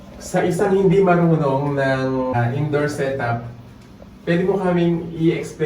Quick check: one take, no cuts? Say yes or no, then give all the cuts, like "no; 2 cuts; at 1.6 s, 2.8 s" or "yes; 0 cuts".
no; 1 cut; at 2.3 s